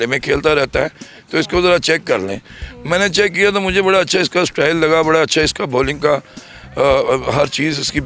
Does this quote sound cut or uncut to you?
uncut